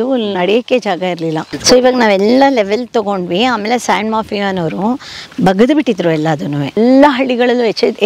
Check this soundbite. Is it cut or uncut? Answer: cut